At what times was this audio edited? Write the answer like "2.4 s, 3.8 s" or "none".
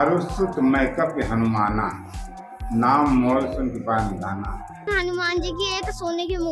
4.8 s